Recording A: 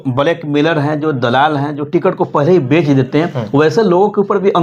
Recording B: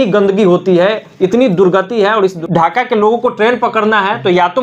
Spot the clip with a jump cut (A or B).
B